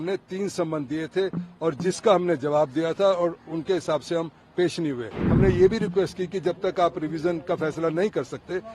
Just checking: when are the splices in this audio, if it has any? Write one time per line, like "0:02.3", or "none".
0:05.2